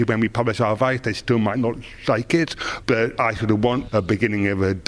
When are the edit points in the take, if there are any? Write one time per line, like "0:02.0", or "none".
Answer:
0:03.6